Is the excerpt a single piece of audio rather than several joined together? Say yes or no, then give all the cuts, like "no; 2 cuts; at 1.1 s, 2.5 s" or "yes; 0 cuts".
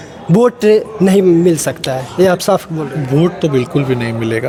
yes; 0 cuts